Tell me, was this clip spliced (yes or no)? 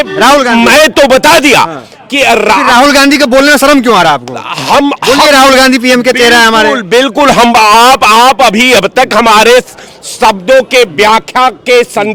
no